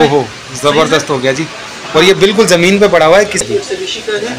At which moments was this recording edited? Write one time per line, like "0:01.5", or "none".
0:03.4